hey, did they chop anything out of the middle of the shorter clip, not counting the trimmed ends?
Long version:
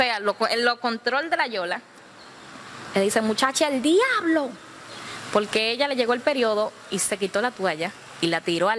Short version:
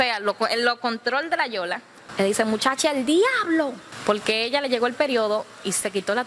yes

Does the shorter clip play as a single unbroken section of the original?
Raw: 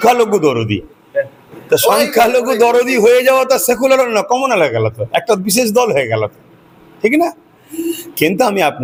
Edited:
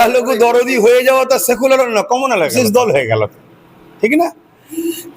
no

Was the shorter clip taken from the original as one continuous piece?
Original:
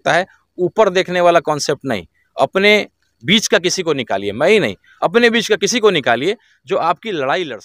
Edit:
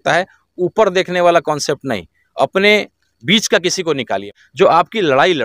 no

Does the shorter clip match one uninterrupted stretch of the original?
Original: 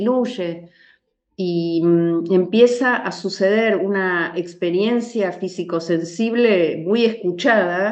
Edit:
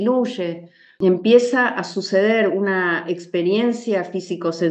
no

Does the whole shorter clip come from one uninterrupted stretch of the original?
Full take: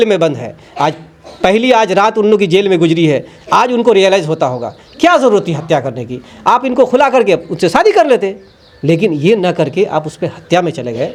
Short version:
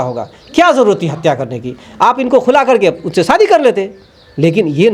yes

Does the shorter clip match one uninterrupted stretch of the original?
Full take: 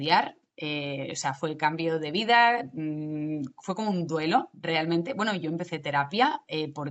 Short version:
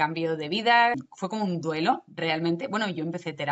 no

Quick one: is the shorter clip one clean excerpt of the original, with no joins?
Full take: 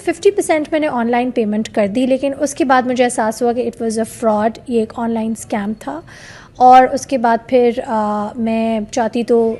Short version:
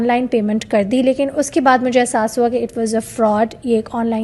yes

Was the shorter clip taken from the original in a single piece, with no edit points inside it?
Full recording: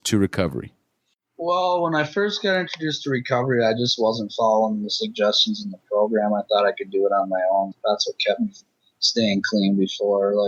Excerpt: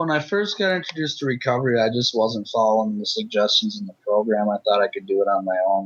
yes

